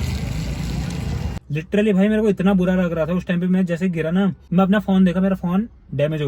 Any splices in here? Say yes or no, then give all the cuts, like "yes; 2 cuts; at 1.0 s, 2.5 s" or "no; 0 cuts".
yes; 2 cuts; at 1.4 s, 4.4 s